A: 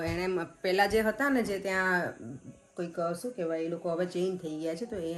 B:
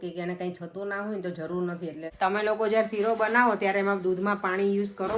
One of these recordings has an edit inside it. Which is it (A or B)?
B